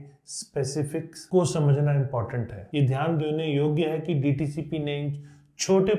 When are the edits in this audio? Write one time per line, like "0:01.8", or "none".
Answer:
0:02.6